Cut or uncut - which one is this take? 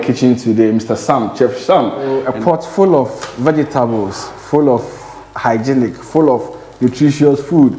cut